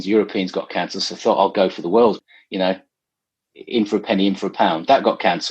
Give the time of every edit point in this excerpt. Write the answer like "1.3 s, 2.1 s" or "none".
2.2 s